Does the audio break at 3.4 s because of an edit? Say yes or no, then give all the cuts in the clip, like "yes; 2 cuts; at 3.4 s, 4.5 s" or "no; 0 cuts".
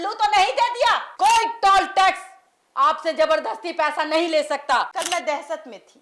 no; 2 cuts; at 1.1 s, 5.0 s